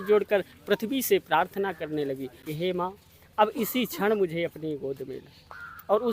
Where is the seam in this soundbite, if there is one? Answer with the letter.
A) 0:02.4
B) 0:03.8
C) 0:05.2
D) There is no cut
A